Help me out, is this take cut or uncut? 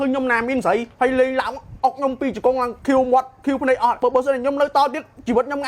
cut